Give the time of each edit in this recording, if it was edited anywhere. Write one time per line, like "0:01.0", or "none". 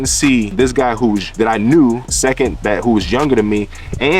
0:00.9
0:02.1